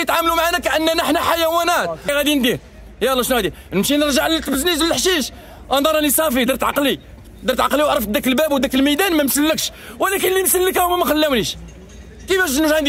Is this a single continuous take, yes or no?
no